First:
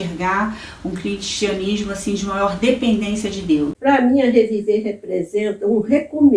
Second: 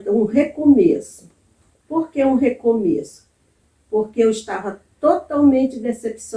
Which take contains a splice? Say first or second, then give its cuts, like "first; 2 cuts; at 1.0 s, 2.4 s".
first; 1 cut; at 3.8 s